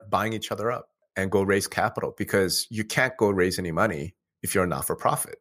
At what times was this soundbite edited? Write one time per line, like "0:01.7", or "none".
0:01.0